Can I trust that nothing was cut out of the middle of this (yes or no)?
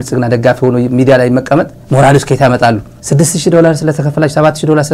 yes